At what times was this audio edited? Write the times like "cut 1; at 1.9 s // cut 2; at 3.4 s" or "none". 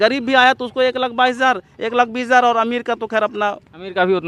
none

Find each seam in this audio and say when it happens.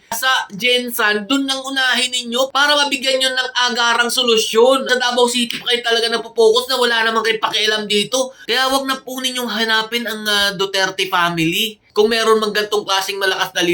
cut 1; at 4.9 s // cut 2; at 8.4 s

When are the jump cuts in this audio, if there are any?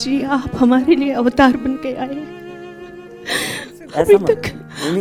none

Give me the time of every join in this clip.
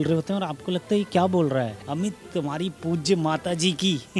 cut 1; at 1.8 s

